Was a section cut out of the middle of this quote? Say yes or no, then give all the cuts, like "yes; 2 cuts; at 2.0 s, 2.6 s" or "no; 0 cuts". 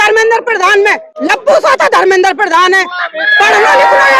yes; 1 cut; at 1.1 s